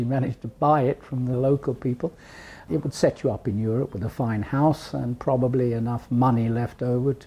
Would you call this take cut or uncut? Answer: cut